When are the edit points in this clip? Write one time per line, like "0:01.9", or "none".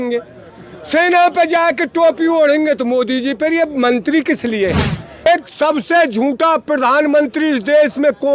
0:05.2